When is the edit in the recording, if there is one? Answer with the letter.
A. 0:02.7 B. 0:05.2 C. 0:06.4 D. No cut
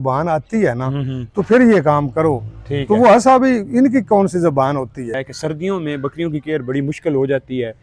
B